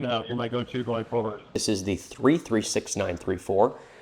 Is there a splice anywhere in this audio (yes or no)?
yes